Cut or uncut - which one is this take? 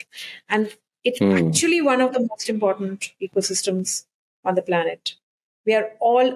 uncut